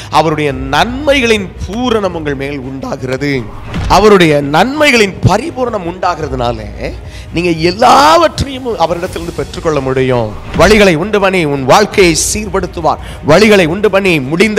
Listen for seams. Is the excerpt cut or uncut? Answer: cut